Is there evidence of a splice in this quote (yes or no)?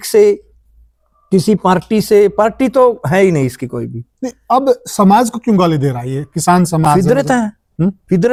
no